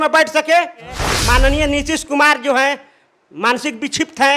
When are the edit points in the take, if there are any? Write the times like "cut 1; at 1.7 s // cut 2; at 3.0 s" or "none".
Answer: cut 1; at 1.1 s

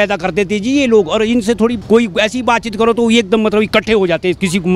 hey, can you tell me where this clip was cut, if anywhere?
cut 1; at 1.8 s

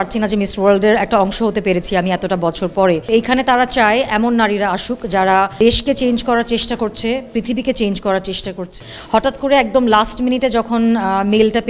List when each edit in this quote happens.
cut 1; at 3.1 s // cut 2; at 5.5 s // cut 3; at 8.9 s

